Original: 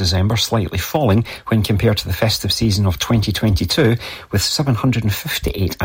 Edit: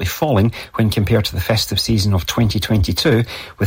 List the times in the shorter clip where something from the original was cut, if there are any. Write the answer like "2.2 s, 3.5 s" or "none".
none